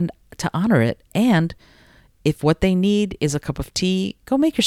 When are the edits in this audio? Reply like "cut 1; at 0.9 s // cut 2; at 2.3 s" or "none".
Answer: none